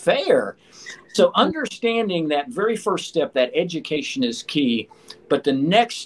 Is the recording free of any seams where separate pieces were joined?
yes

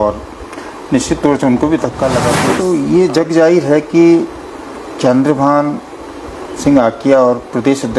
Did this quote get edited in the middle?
yes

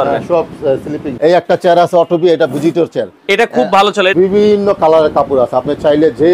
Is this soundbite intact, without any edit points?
no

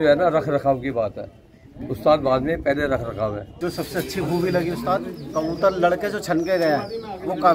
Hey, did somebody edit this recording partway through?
yes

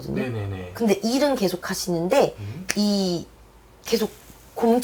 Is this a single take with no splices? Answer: yes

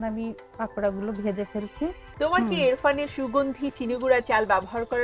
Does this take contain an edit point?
yes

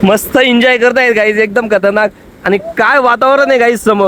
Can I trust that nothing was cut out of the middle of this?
yes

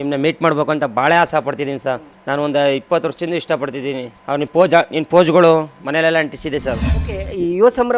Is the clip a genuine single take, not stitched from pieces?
no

